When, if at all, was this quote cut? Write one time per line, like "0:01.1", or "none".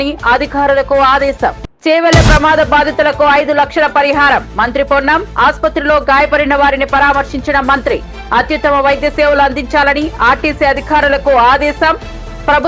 0:01.7